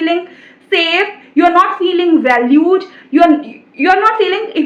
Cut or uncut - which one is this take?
uncut